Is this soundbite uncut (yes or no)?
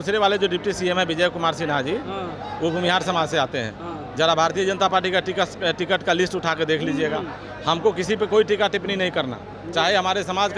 yes